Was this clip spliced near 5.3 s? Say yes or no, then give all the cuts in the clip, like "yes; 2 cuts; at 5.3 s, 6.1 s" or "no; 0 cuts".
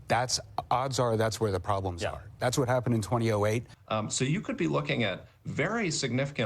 no; 1 cut; at 3.7 s